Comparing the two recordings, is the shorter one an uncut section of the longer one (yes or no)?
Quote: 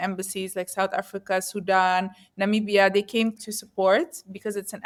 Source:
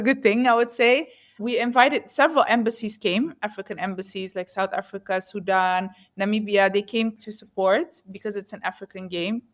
yes